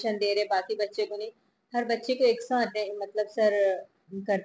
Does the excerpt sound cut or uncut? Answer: uncut